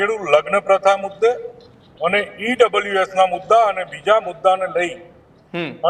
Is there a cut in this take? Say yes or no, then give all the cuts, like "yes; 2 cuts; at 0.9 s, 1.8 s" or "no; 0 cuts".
no; 0 cuts